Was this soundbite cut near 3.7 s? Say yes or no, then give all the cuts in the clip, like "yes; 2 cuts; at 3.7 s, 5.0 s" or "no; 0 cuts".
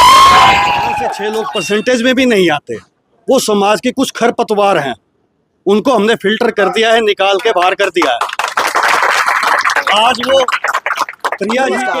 no; 1 cut; at 1.2 s